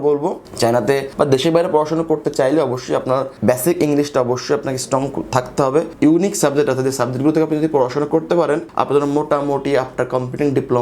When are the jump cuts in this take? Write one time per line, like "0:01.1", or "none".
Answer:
0:05.9